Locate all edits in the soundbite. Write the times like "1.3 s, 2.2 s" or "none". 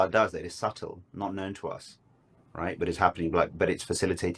3.5 s